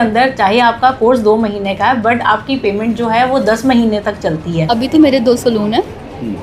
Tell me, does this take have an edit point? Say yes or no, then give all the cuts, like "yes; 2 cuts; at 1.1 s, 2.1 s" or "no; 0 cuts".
yes; 1 cut; at 4.7 s